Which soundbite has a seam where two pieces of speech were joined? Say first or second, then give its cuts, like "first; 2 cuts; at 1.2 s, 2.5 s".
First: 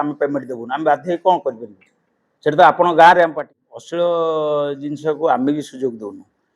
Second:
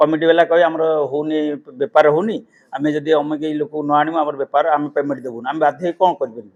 first; 1 cut; at 3.3 s